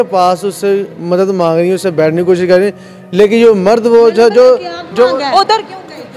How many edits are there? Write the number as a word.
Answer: zero